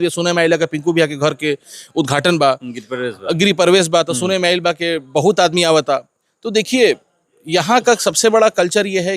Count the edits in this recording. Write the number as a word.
zero